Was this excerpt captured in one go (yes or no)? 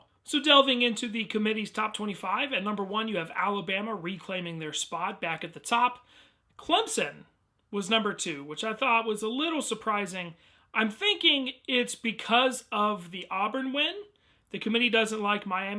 no